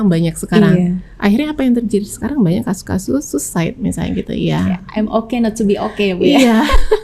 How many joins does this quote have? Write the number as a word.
zero